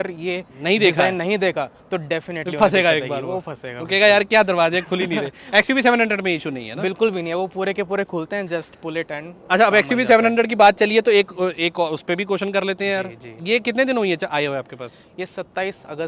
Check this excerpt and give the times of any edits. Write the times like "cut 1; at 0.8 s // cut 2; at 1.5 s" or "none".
none